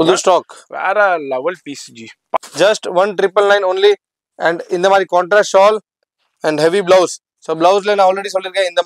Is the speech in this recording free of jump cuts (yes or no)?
no